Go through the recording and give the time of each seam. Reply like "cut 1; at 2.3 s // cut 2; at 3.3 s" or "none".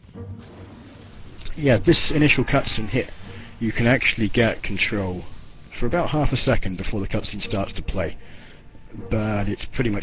cut 1; at 8.9 s